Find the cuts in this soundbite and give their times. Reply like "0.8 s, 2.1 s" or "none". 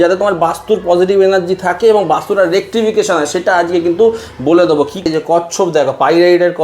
5.1 s